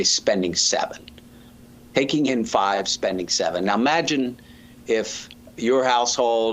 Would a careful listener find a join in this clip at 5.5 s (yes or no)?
yes